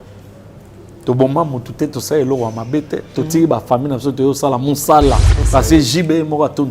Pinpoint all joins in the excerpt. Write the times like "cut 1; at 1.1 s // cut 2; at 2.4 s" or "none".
cut 1; at 5.4 s